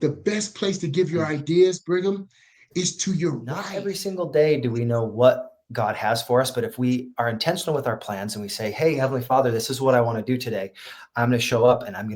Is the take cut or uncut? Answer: cut